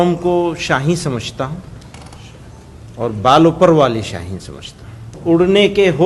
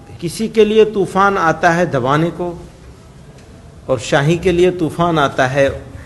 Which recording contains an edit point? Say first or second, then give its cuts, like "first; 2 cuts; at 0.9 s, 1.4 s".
first; 1 cut; at 5.2 s